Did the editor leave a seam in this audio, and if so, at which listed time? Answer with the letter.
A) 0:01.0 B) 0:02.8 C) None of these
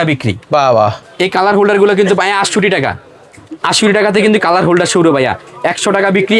A